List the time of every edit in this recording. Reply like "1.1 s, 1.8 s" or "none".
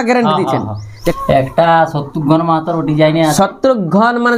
1.0 s